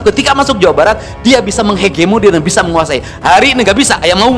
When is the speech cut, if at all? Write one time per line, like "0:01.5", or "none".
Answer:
none

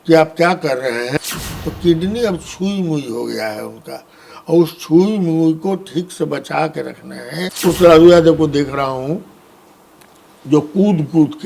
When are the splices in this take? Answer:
0:01.2
0:07.5

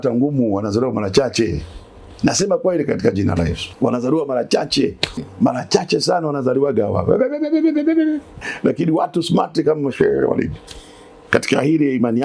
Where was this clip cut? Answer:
0:03.6
0:05.3
0:08.4

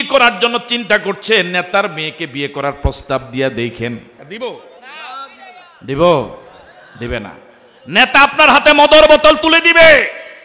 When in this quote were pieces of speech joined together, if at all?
0:04.2

